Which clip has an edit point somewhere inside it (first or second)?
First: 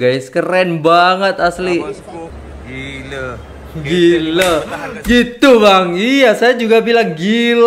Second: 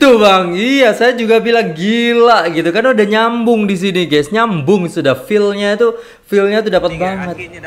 first